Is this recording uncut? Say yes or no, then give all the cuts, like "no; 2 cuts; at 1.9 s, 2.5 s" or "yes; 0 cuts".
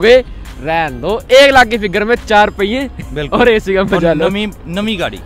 yes; 0 cuts